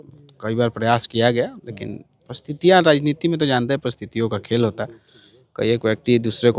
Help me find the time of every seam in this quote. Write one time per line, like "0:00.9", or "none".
none